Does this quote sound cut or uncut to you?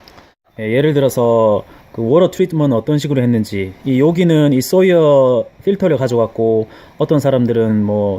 uncut